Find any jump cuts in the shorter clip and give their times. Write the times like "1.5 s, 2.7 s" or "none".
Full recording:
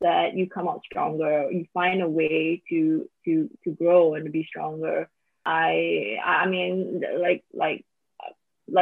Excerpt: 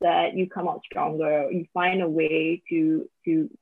none